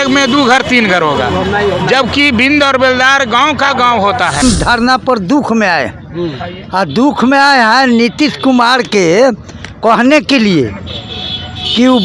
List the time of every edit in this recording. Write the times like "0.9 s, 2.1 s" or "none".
4.4 s